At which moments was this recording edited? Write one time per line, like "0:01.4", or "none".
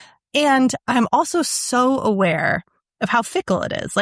none